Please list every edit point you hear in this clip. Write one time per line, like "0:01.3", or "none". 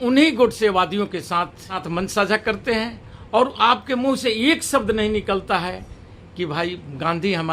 0:01.8